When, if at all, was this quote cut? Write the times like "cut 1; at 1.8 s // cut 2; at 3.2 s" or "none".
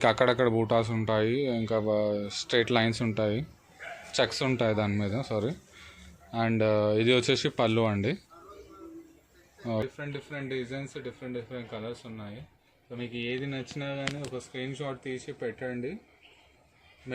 cut 1; at 9.8 s